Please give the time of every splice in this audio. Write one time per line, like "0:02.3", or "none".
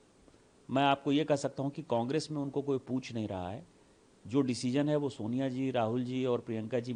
none